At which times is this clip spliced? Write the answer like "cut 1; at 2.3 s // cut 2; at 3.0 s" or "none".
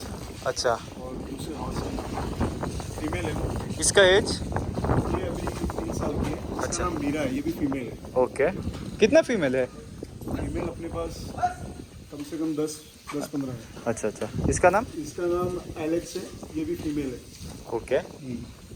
none